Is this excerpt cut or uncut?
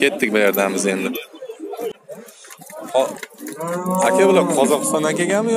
cut